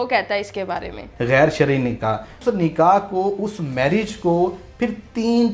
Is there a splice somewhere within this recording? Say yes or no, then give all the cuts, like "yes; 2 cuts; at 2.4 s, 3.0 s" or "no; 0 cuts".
yes; 2 cuts; at 1.0 s, 2.3 s